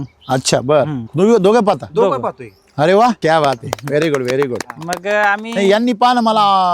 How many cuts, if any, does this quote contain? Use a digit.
1